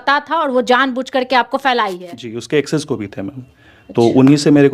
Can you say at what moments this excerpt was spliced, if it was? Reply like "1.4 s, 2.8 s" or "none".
none

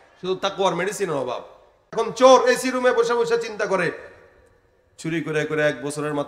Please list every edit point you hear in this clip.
1.9 s

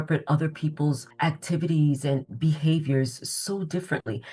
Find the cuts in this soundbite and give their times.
1.1 s

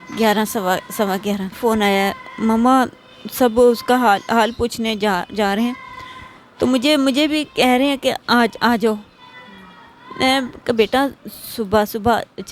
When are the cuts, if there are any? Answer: 1.6 s

